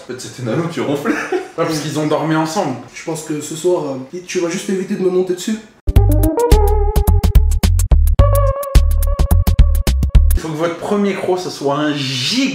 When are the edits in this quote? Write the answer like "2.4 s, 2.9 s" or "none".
1.5 s, 2.8 s, 4.1 s, 10.3 s